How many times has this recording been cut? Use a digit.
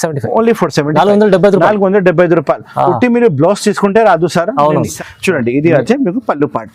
1